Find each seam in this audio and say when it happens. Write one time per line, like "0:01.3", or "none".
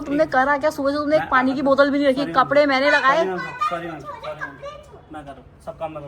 none